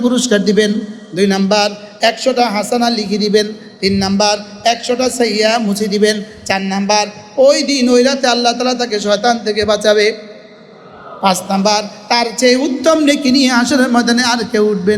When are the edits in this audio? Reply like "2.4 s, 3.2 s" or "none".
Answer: none